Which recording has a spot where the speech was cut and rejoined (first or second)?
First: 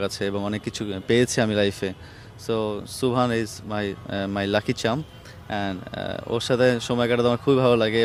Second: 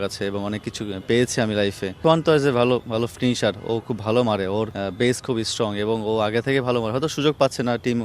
second